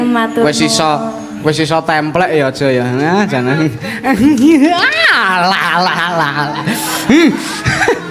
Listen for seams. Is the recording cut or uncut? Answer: uncut